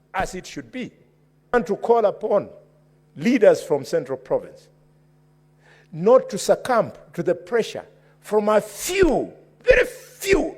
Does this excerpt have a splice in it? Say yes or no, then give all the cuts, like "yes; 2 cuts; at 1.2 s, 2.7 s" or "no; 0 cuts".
yes; 1 cut; at 1.5 s